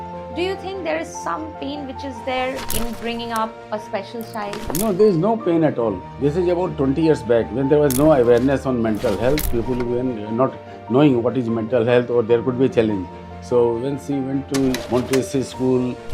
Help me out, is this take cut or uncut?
cut